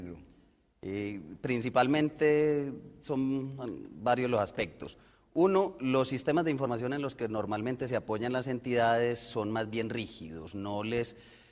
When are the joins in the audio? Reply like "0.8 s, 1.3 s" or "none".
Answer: 1.3 s